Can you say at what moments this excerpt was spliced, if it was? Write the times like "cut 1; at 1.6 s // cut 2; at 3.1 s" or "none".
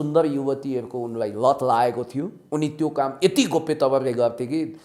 cut 1; at 2.4 s